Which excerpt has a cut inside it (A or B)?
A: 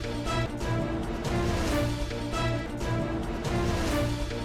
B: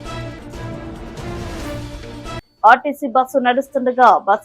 B